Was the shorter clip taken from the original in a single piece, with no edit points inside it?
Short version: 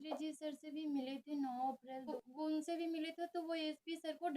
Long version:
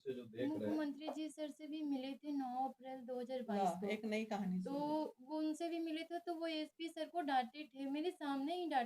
no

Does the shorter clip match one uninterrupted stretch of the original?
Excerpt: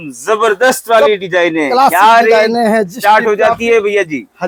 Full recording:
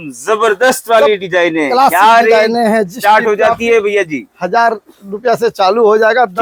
yes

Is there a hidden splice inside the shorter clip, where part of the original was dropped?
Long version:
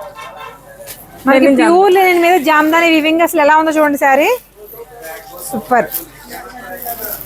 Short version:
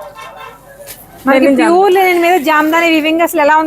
no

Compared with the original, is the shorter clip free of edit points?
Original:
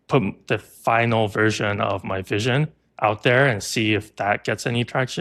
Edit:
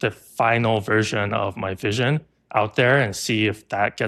yes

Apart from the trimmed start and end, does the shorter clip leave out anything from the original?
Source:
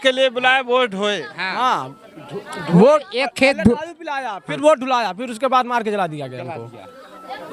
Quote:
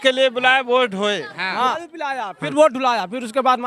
yes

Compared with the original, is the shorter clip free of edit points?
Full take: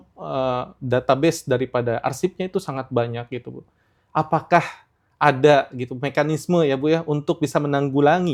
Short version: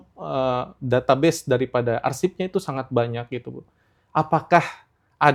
yes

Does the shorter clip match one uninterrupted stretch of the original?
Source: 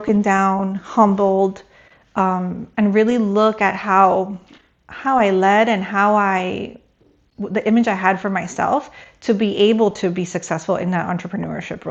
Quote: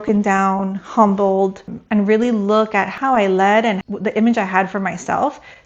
no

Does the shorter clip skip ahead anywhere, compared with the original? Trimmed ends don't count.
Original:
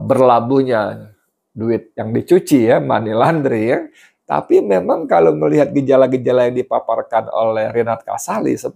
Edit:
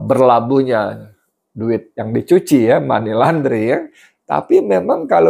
no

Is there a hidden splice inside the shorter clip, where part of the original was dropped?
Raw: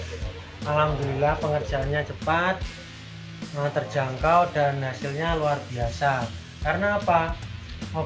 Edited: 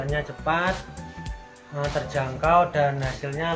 no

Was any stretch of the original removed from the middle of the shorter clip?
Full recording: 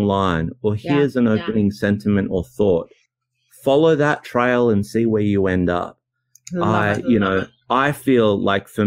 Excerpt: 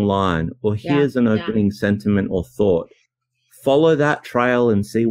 no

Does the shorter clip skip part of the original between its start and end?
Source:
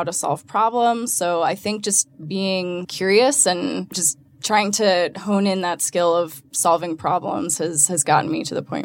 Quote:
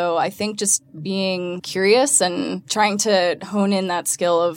yes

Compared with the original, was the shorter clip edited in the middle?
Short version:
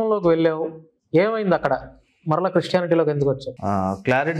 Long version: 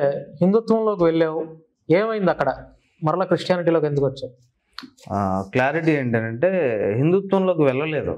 yes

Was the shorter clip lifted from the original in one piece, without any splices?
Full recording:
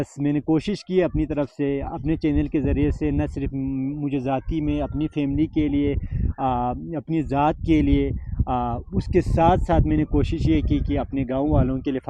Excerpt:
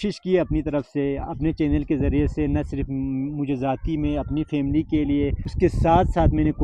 no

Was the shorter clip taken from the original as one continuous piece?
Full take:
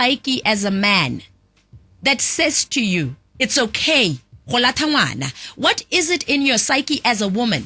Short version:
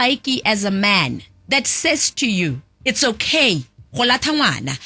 no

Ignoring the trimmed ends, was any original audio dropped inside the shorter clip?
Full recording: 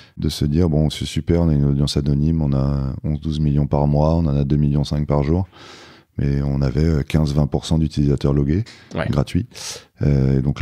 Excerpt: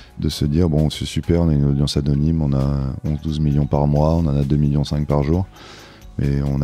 no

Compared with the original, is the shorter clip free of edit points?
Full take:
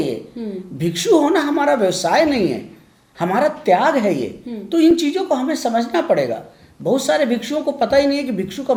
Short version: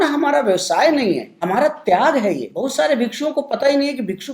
no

